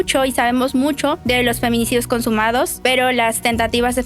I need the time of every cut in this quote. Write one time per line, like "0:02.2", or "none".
0:01.2
0:02.7